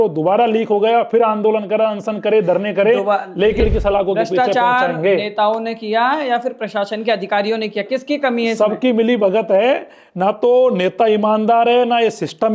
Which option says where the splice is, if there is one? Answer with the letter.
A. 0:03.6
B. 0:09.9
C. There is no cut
A